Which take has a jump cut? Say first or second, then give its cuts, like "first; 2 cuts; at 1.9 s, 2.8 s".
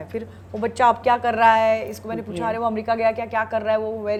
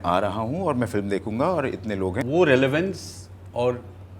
second; 1 cut; at 2.3 s